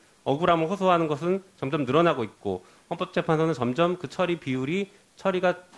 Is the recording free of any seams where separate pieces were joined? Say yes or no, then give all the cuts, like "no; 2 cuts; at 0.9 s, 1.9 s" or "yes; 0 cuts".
yes; 0 cuts